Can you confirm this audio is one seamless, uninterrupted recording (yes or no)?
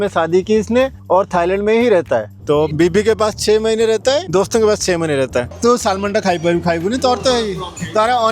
no